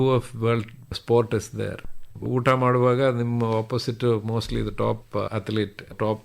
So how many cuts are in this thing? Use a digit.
2